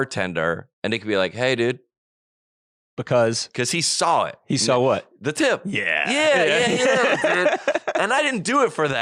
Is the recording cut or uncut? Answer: uncut